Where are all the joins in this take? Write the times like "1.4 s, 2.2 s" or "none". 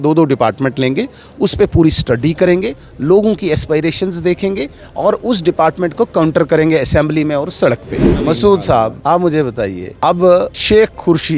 8.1 s, 9.0 s, 9.8 s, 10.6 s